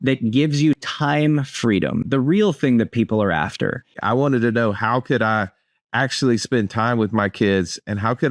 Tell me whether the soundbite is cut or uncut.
cut